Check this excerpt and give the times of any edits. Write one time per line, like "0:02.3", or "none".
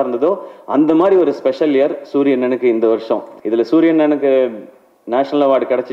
0:03.3